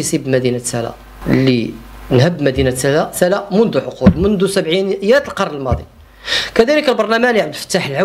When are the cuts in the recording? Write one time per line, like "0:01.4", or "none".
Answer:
0:01.1